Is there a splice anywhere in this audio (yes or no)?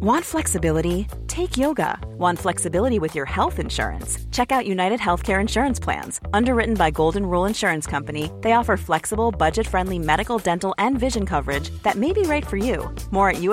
no